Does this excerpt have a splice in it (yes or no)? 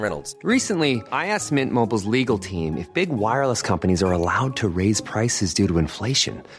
no